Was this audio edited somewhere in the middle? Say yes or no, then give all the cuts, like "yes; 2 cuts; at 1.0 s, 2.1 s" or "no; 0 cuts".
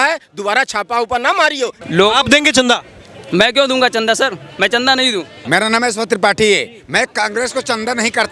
yes; 2 cuts; at 1.8 s, 5.4 s